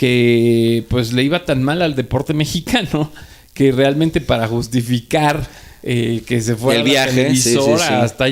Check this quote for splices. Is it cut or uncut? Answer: uncut